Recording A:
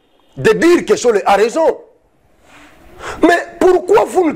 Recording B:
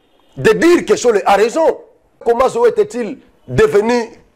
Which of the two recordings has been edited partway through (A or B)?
B